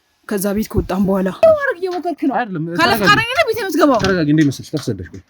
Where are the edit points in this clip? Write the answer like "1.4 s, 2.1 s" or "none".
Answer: 1.4 s